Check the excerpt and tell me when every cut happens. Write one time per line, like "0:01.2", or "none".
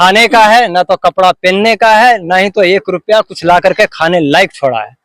none